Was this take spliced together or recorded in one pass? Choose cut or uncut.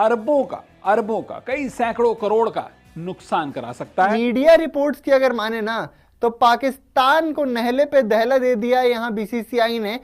cut